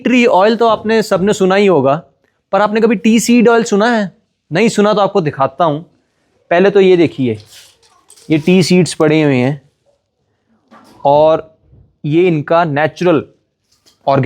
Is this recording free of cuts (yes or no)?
yes